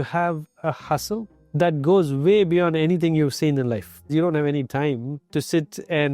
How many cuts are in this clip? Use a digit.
2